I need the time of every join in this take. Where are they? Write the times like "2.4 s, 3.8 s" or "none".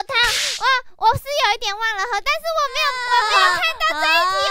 2.9 s